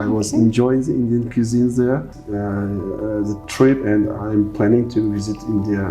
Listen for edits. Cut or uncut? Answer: cut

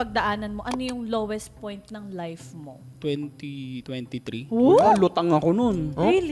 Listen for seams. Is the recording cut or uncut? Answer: uncut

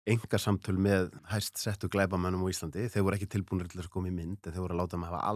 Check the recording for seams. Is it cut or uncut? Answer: cut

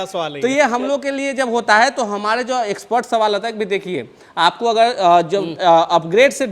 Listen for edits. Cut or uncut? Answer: uncut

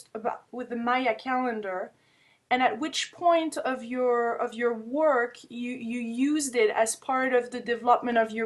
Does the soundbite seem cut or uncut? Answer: cut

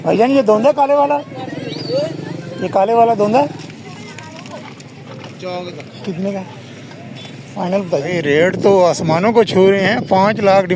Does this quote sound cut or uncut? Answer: cut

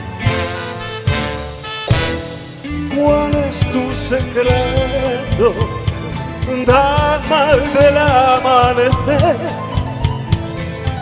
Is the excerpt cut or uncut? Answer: uncut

